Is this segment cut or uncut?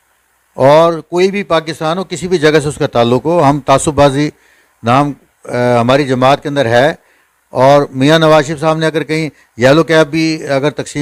uncut